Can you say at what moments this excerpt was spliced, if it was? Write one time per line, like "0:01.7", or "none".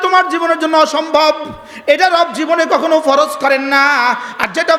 none